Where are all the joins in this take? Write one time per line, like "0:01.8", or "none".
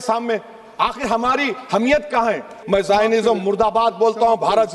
0:02.5